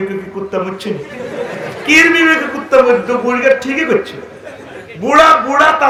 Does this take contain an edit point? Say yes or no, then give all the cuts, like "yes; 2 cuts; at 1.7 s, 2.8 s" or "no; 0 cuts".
no; 0 cuts